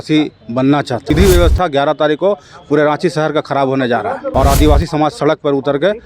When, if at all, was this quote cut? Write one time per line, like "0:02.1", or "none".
0:01.1
0:04.2